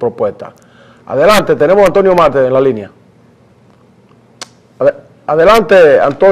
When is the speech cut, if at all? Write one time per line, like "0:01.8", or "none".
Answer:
none